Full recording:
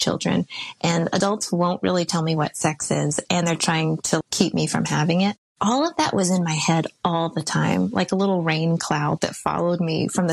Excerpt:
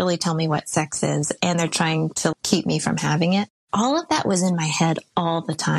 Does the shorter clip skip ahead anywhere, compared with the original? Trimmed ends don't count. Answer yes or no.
no